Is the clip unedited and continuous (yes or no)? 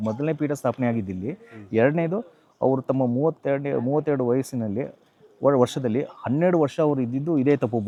yes